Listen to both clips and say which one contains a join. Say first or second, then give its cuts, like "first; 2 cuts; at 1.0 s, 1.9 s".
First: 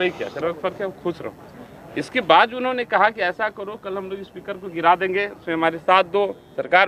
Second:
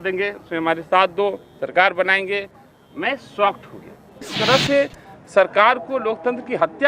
second; 1 cut; at 4.3 s